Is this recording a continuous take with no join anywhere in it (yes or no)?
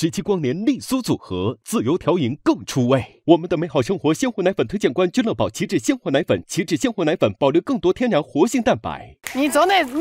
yes